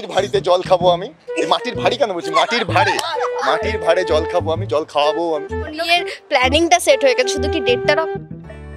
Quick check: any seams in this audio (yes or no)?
yes